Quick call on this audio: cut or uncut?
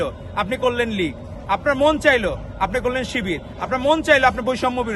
uncut